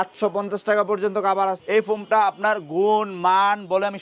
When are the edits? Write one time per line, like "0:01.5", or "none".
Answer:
0:01.6